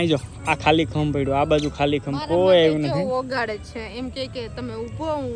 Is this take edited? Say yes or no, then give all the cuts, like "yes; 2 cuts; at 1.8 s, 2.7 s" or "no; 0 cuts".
no; 0 cuts